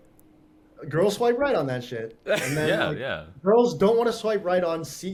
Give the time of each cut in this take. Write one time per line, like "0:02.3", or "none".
none